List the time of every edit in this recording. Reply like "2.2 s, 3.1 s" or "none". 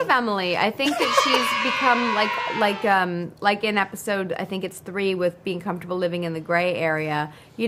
none

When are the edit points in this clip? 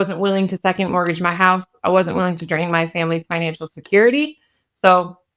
none

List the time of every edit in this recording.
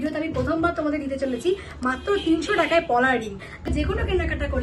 3.7 s

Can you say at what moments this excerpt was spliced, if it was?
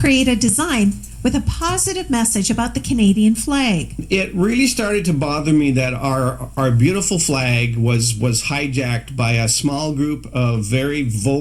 3.9 s

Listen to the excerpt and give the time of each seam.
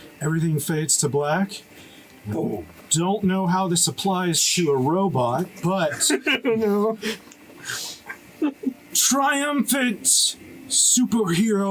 none

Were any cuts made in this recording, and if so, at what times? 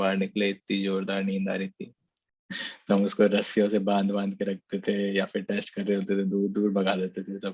2.7 s

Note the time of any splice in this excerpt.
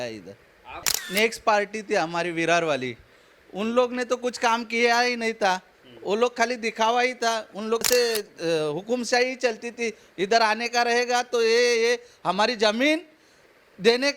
0.9 s, 7.8 s

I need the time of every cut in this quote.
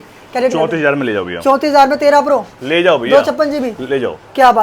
none

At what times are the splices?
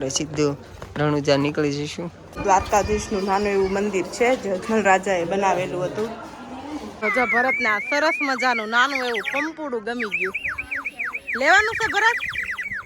2.4 s, 6.9 s

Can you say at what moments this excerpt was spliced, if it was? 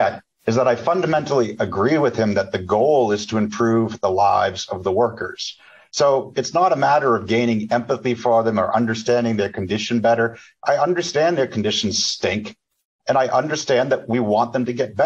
none

